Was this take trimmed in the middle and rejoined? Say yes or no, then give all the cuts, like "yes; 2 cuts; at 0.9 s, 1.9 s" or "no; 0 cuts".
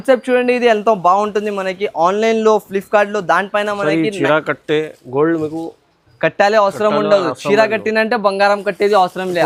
no; 0 cuts